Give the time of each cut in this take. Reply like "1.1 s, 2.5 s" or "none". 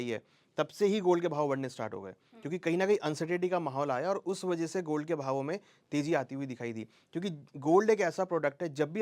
none

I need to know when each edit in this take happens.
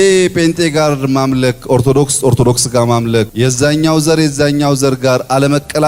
3.3 s

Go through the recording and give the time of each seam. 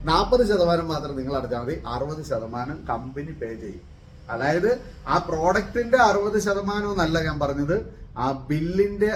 none

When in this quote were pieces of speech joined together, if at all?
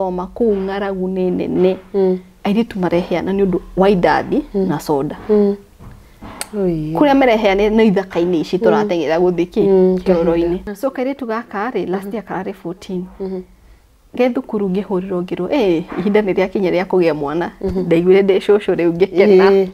10.7 s

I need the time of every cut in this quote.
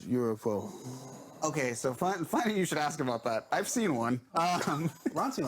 none

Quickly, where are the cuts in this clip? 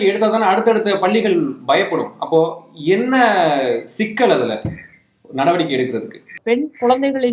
6.4 s

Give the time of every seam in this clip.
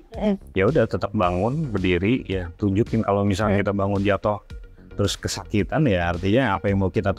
none

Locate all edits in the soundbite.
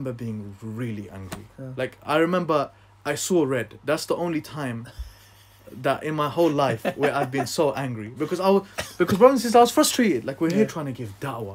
none

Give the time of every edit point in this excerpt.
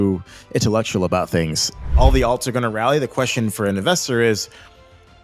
1.9 s

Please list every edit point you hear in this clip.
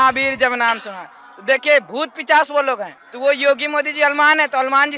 3.0 s

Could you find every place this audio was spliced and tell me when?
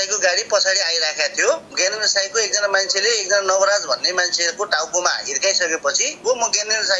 1.7 s, 6.1 s

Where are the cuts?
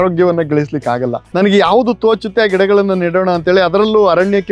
1.2 s

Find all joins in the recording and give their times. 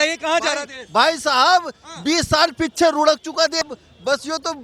3.6 s

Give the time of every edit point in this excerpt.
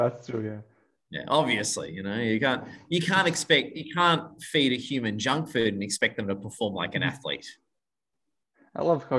none

